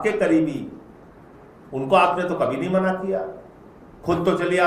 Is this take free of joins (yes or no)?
yes